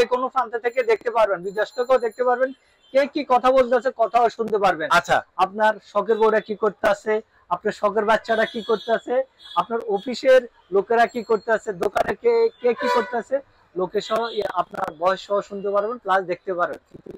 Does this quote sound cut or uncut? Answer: uncut